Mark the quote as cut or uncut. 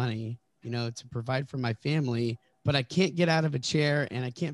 cut